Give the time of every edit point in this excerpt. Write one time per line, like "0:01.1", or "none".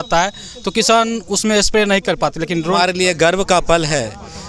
0:02.7